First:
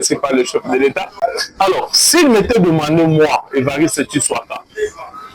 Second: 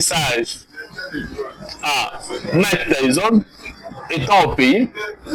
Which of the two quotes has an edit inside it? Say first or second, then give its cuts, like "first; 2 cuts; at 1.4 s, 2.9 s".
first; 1 cut; at 0.9 s